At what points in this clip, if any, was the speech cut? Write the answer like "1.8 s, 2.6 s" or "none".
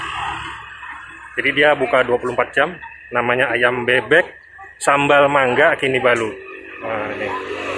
none